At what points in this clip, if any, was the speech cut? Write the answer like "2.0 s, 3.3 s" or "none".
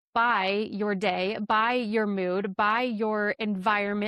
none